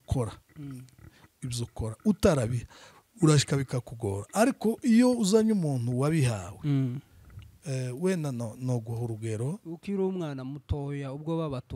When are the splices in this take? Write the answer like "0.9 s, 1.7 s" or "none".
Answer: 9.6 s